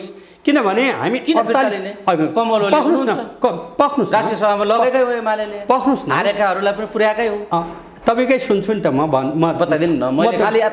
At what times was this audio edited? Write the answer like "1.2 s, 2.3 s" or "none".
none